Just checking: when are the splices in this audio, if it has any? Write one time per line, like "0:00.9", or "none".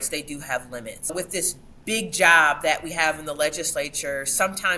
0:01.1